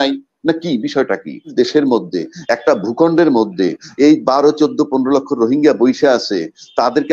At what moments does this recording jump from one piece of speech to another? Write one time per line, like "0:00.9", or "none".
0:01.5